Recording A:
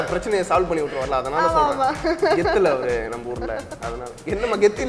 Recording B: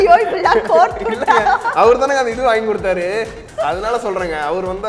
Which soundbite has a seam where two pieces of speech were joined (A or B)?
B